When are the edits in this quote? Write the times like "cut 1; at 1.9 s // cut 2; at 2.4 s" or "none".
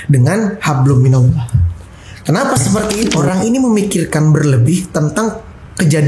cut 1; at 3.1 s